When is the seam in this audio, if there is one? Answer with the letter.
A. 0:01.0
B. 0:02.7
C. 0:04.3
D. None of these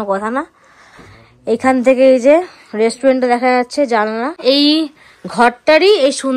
C